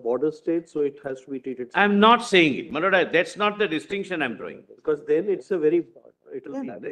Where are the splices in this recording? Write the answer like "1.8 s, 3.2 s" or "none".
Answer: none